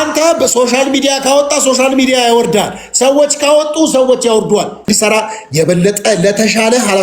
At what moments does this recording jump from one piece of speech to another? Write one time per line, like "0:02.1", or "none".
0:04.9